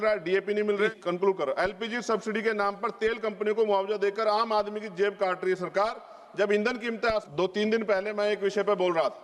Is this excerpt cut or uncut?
cut